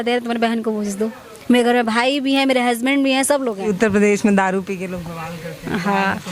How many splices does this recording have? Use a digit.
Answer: 1